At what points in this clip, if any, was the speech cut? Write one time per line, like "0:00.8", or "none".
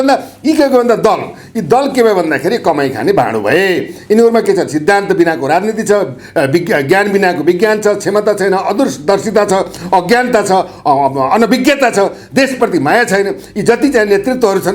none